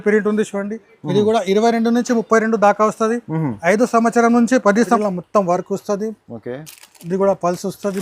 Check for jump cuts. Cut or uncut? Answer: cut